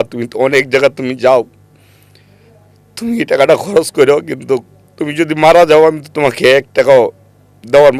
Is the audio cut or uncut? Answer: uncut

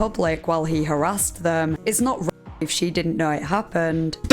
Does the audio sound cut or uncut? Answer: cut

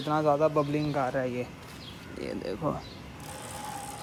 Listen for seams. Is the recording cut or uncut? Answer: uncut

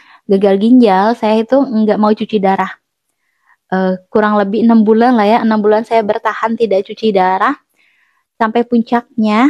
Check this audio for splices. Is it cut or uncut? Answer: uncut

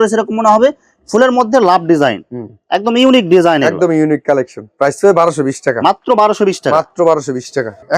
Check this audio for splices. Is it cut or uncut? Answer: uncut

